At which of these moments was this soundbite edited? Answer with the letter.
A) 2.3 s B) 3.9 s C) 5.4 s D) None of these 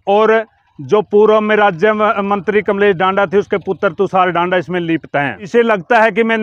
C